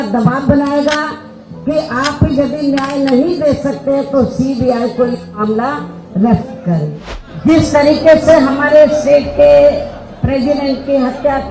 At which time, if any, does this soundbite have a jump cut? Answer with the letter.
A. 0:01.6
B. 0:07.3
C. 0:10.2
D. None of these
B